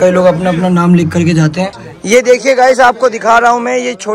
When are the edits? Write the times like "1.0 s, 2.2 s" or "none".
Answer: 1.9 s